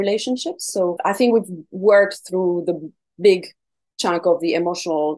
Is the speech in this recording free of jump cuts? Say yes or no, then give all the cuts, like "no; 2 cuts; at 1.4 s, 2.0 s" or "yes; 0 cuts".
no; 1 cut; at 1.0 s